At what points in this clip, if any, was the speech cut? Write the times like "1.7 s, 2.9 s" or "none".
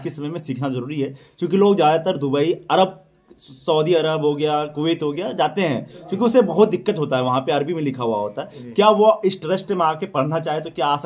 none